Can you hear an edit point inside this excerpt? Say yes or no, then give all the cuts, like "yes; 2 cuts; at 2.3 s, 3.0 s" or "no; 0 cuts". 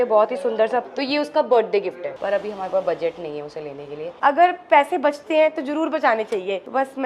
yes; 3 cuts; at 0.9 s, 2.1 s, 4.1 s